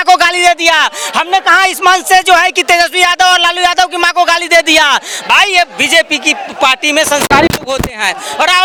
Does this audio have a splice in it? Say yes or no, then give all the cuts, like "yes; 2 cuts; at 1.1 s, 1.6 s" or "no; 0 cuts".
no; 0 cuts